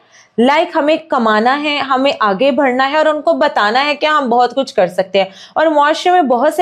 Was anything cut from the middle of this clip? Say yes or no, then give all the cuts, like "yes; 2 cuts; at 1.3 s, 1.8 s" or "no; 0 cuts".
no; 0 cuts